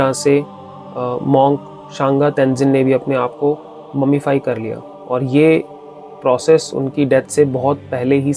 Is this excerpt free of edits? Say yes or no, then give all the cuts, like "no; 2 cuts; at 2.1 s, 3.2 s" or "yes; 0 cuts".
yes; 0 cuts